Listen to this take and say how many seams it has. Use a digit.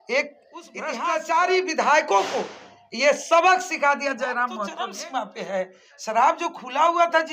2